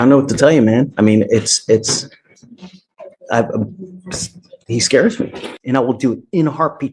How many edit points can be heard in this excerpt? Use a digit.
1